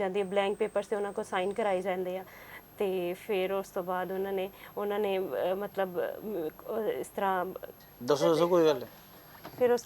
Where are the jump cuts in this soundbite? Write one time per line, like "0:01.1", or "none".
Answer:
none